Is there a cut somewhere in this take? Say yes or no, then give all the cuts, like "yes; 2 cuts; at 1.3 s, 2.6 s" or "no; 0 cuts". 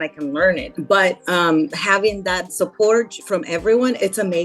yes; 2 cuts; at 2.5 s, 3.2 s